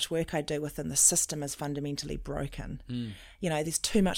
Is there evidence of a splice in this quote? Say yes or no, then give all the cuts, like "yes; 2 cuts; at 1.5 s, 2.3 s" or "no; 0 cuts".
no; 0 cuts